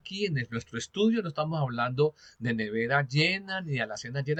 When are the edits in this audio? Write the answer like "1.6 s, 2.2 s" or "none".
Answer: none